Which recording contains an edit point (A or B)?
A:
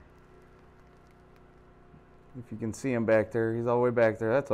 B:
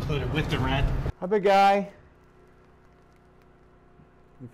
B